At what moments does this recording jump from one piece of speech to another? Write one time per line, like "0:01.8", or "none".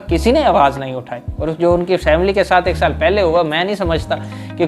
0:01.2